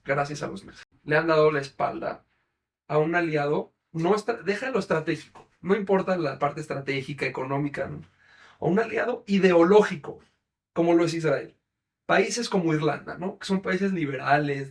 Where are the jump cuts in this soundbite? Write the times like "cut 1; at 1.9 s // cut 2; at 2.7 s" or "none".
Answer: cut 1; at 0.9 s